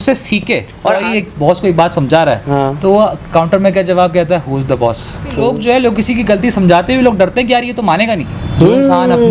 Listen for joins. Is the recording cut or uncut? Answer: cut